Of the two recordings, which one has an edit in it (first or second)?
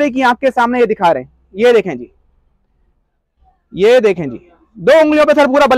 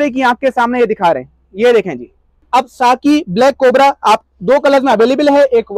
second